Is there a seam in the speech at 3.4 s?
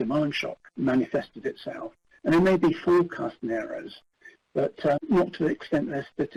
no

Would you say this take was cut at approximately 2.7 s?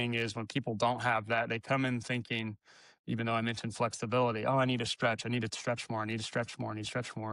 no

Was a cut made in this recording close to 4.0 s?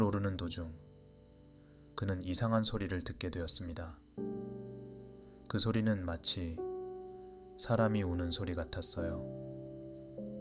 yes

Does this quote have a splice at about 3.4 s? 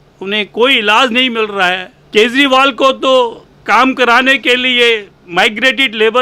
no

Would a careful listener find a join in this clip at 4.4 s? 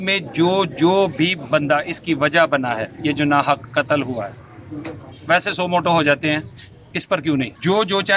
no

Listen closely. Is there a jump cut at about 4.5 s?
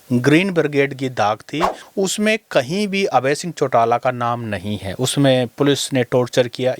no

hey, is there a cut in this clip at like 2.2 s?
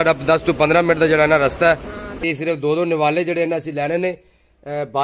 yes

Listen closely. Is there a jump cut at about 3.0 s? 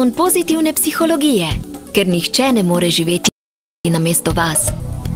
no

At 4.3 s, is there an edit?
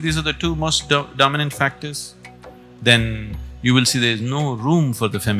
no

